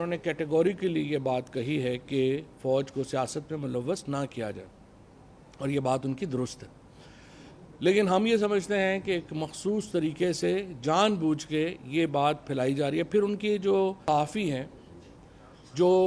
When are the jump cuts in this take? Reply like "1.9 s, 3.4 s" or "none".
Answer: 14.1 s